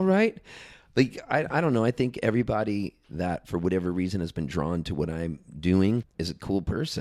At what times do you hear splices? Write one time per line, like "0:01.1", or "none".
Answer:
0:06.1